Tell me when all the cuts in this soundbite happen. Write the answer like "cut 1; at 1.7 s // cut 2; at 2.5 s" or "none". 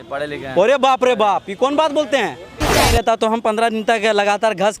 cut 1; at 2.8 s